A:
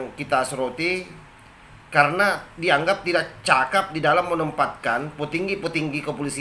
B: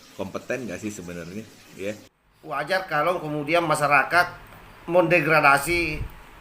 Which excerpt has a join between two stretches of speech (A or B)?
B